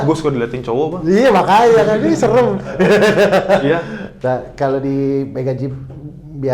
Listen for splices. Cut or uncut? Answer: uncut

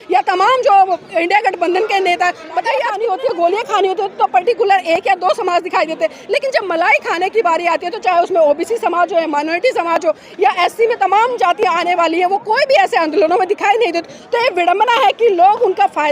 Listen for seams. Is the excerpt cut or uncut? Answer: cut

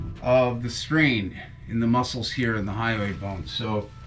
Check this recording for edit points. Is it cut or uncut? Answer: uncut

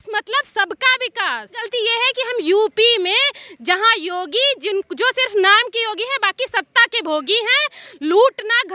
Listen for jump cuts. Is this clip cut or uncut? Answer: cut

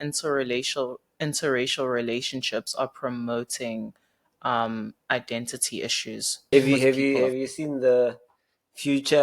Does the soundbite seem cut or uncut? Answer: cut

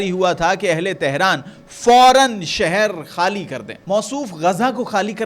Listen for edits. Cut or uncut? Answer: cut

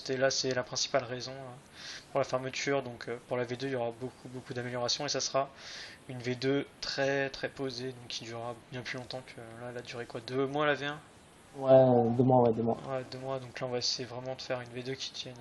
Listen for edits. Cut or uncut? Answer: cut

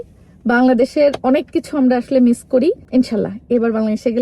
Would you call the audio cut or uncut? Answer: cut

